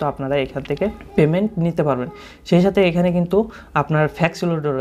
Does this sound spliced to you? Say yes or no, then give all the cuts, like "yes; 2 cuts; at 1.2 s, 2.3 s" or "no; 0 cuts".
yes; 1 cut; at 1.0 s